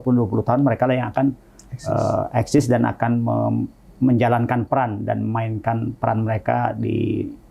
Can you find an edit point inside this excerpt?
no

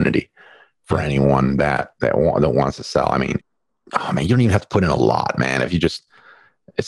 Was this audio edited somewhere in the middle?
yes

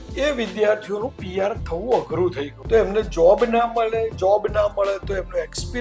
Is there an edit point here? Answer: yes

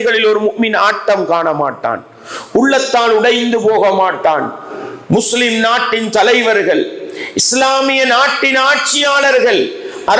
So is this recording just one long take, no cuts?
yes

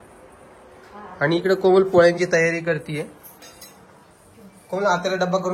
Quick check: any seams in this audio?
no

